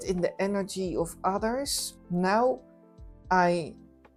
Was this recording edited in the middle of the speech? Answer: no; 0 cuts

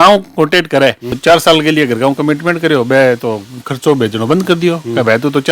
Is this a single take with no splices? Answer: no; 1 cut; at 1.2 s

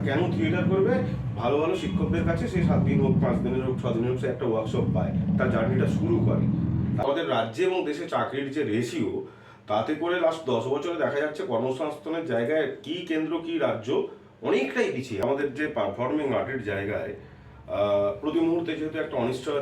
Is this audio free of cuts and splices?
no; 2 cuts; at 7.0 s, 15.2 s

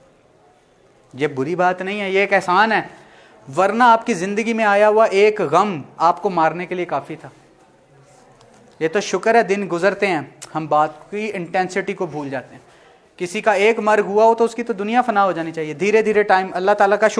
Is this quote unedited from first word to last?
yes; 0 cuts

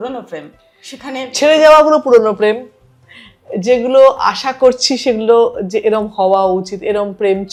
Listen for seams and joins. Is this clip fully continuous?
yes; 0 cuts

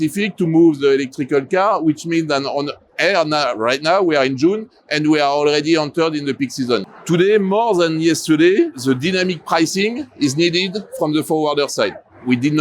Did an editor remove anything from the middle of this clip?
yes; 1 cut; at 6.9 s

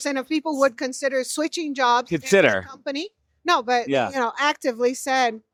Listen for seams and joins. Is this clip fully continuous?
yes; 0 cuts

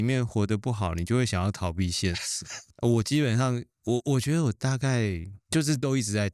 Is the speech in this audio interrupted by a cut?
yes; 1 cut; at 5.3 s

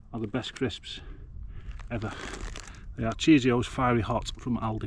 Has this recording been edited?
no; 0 cuts

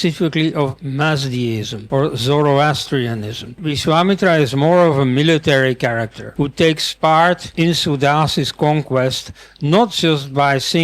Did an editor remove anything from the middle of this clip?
yes; 4 cuts; at 1.7 s, 3.7 s, 6.2 s, 7.5 s

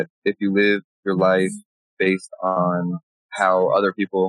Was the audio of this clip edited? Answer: yes; 2 cuts; at 0.9 s, 2.6 s

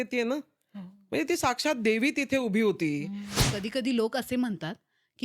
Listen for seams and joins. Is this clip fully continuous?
no; 1 cut; at 3.4 s

